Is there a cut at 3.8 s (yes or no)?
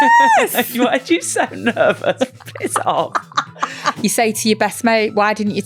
yes